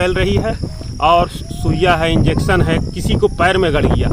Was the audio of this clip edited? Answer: no; 0 cuts

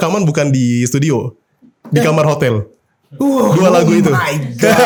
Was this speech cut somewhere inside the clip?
no; 0 cuts

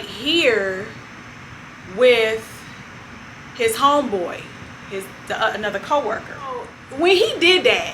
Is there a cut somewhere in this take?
yes; 1 cut; at 6.8 s

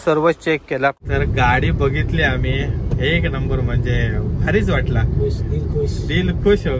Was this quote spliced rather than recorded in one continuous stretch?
yes; 1 cut; at 1.0 s

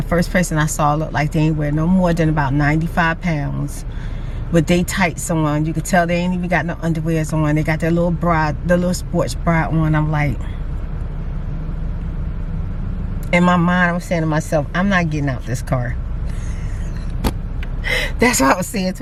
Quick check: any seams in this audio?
no; 0 cuts

